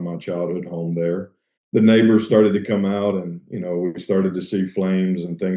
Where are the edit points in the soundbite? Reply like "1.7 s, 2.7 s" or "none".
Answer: 1.4 s